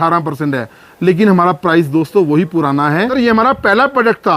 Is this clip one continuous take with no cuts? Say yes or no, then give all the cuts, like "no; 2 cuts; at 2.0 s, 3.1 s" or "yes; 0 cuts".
no; 1 cut; at 3.1 s